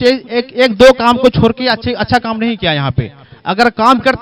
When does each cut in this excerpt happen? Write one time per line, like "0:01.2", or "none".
none

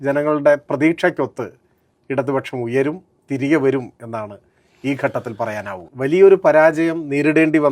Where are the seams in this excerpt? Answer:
0:05.8

